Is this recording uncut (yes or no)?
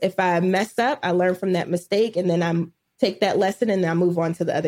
yes